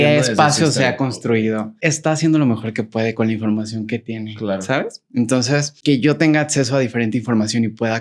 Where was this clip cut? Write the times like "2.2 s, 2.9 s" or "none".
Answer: 1.7 s, 5.7 s